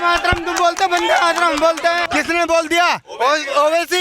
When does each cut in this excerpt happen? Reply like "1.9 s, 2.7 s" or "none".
2.0 s